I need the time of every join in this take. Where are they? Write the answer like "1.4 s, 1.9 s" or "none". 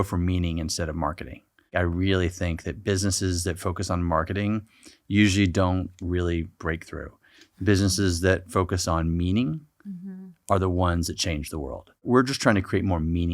1.7 s, 12.0 s